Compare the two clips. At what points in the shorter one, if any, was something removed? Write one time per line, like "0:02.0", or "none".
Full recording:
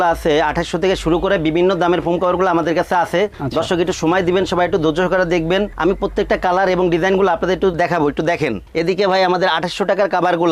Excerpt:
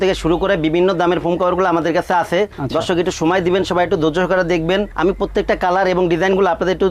none